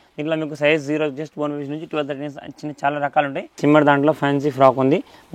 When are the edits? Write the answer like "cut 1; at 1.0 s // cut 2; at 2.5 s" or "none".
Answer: cut 1; at 3.6 s